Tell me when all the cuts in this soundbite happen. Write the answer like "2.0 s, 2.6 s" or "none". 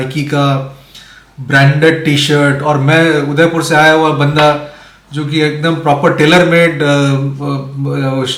none